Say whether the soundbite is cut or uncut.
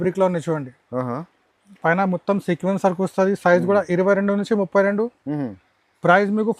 uncut